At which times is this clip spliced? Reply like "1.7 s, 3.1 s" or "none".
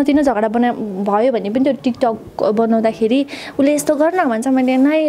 none

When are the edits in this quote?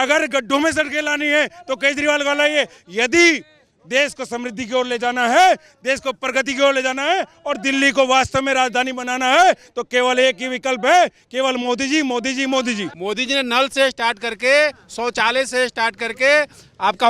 12.9 s

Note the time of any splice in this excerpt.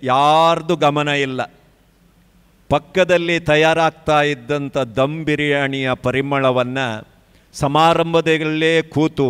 none

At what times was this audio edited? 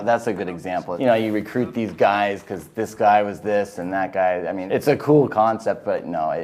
0.9 s, 4.6 s

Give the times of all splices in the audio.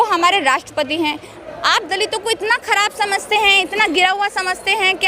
1.3 s

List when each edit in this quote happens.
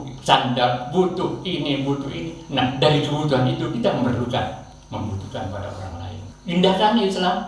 6.3 s

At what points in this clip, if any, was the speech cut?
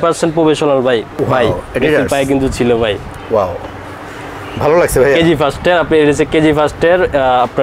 1.1 s

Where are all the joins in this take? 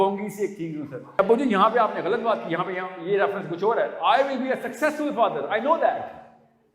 1.2 s

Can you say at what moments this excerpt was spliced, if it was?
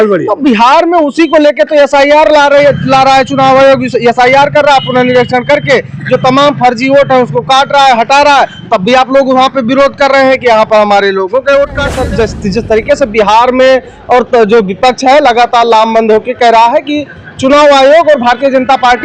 11.9 s

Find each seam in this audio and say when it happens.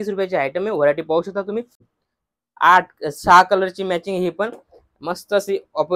1.8 s

